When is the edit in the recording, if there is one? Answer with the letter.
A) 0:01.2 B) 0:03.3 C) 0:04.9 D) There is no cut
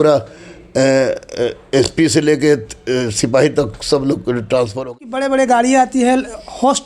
C